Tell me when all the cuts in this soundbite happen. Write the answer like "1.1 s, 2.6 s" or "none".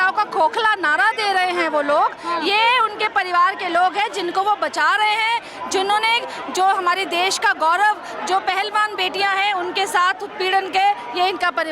none